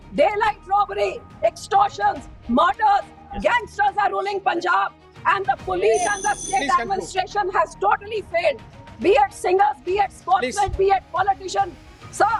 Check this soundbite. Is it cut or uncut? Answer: uncut